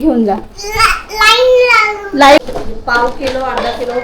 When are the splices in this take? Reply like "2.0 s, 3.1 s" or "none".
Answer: 2.4 s